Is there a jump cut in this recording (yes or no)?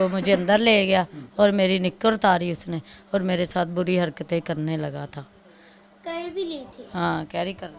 no